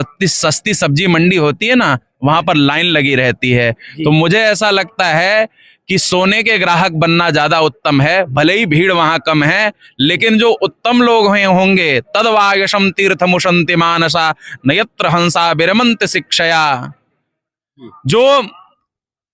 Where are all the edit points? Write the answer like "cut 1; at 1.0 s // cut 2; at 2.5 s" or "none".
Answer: none